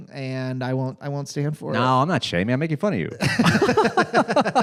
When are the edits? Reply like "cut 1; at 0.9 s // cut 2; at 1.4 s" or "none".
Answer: none